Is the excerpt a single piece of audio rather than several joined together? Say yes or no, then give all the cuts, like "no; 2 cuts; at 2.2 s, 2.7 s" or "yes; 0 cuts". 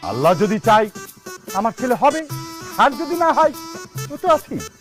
yes; 0 cuts